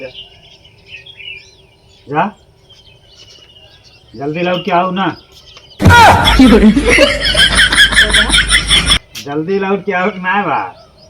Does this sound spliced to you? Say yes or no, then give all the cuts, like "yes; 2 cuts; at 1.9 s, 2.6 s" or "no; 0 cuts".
yes; 2 cuts; at 5.6 s, 6.7 s